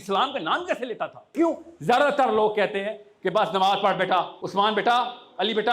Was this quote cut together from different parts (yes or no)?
yes